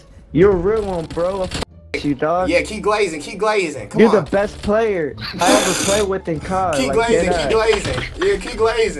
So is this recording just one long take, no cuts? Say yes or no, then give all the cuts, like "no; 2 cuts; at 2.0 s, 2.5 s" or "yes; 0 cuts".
yes; 0 cuts